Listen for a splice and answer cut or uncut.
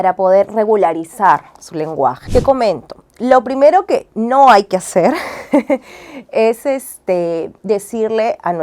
cut